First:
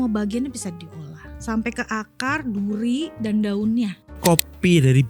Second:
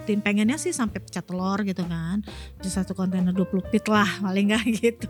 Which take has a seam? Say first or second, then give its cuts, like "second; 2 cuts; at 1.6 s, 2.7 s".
first; 2 cuts; at 1.4 s, 4.2 s